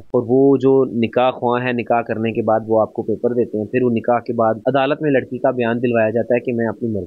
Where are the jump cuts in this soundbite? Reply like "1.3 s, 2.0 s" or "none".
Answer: none